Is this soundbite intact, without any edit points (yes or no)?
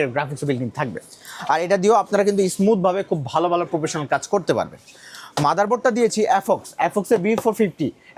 yes